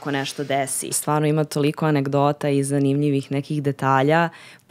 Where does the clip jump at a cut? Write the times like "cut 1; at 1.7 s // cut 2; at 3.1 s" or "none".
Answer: cut 1; at 1.0 s